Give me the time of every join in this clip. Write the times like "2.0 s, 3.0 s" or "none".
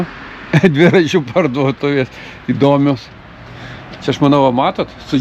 none